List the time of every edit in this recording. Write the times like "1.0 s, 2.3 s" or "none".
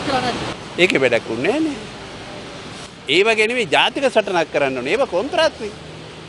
none